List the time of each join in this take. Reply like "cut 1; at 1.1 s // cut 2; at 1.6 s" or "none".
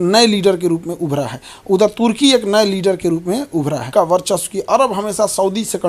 cut 1; at 3.9 s